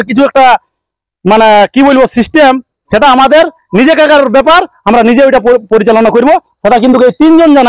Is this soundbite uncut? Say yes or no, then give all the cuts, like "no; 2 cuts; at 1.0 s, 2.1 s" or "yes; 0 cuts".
yes; 0 cuts